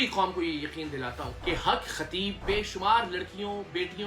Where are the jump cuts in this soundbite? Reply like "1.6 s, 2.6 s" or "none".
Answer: 1.3 s, 2.4 s